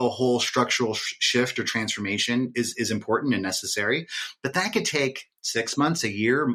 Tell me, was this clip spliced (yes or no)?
no